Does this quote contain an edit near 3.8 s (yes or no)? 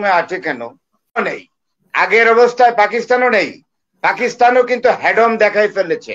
no